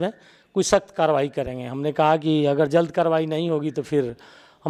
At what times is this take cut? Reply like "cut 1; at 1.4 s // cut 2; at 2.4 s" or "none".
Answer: none